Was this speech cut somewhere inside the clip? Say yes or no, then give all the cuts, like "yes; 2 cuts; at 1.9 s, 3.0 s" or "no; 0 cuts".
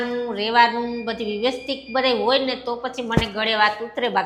no; 0 cuts